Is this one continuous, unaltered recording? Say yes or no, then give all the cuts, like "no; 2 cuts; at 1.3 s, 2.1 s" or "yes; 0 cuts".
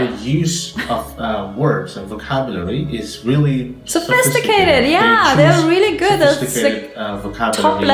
yes; 0 cuts